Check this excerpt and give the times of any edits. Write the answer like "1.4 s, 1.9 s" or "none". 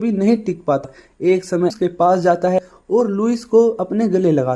1.7 s